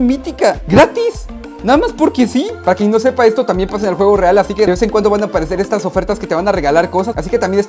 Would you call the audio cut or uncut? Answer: uncut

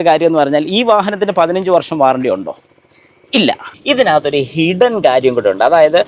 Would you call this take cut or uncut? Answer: cut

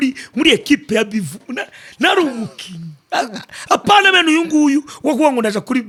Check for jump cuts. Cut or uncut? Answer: uncut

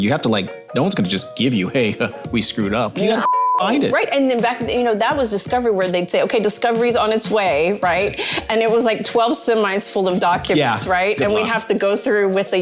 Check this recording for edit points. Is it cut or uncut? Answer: uncut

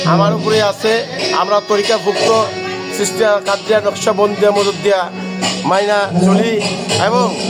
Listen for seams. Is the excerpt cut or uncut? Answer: uncut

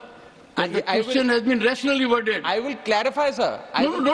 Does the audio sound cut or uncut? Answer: uncut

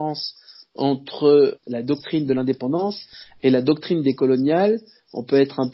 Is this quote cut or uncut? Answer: cut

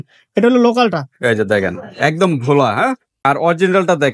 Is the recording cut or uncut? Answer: cut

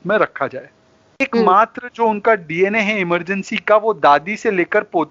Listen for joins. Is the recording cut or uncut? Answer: cut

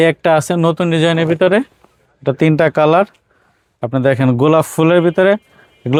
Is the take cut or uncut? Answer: uncut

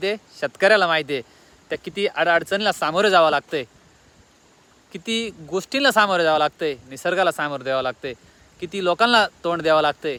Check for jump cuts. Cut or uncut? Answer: uncut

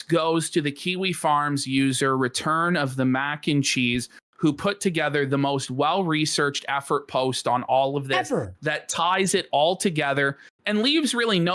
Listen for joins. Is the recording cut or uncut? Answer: uncut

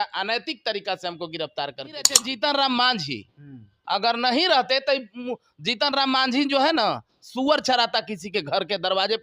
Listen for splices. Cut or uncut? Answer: cut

